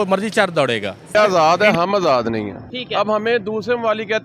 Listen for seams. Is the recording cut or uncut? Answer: cut